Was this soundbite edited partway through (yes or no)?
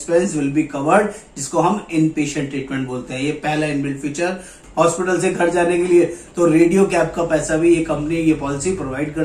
yes